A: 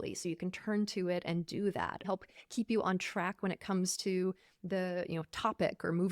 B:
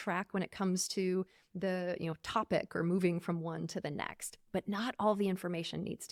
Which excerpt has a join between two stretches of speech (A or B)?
A